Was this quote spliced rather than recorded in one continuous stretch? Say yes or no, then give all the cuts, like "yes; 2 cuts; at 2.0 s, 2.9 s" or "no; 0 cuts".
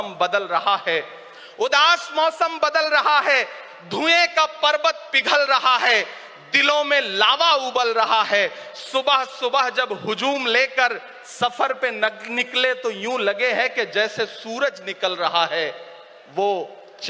no; 0 cuts